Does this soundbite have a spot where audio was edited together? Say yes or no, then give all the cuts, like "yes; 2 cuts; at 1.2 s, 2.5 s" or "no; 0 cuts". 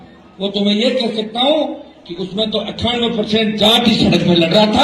no; 0 cuts